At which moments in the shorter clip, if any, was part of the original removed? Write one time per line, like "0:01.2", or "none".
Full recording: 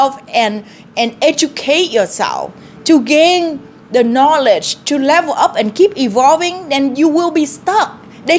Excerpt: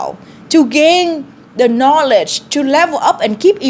none